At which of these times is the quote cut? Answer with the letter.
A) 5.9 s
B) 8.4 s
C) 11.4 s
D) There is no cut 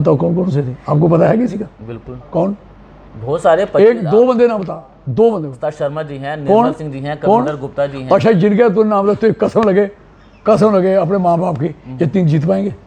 D